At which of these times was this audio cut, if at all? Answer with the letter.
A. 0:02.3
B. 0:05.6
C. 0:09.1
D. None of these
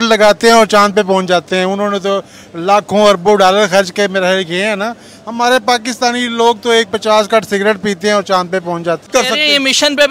C